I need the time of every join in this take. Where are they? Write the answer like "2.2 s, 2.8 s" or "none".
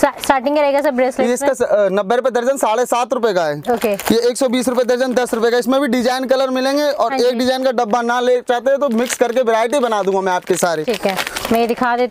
none